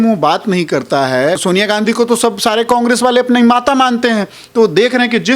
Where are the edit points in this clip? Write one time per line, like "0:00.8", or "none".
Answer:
0:01.4